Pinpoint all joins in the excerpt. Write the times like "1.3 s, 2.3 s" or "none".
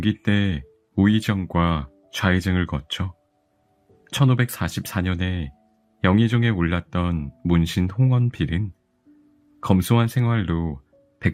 none